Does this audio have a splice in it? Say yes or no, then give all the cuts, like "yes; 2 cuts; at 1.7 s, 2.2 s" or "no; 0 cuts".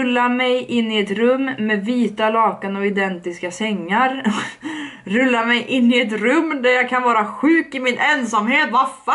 no; 0 cuts